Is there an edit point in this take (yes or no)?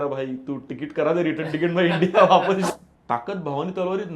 yes